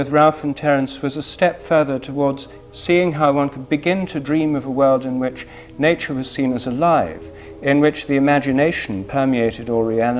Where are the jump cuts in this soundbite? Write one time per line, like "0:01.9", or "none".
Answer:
none